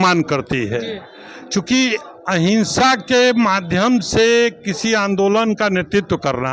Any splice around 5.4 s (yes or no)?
no